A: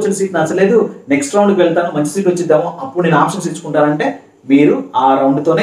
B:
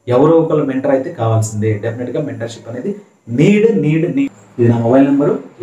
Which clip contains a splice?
B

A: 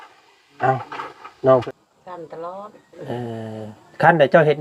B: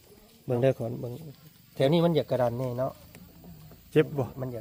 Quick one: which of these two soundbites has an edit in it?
A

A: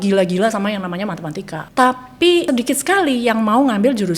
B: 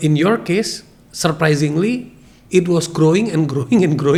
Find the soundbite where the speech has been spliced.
A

